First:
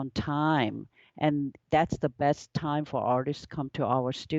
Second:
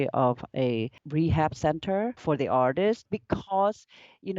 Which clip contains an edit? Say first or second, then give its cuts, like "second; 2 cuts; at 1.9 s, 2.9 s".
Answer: second; 3 cuts; at 1.0 s, 2.2 s, 3.1 s